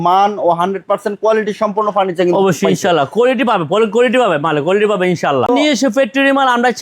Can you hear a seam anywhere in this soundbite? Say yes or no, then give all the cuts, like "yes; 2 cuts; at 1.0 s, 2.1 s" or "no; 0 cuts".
yes; 1 cut; at 5.5 s